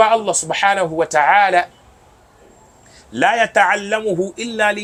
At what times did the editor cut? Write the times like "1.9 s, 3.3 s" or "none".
none